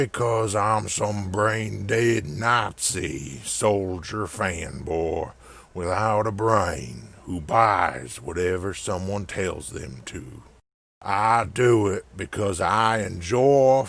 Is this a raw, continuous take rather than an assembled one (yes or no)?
no